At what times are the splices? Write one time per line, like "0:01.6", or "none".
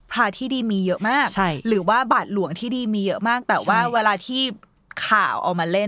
none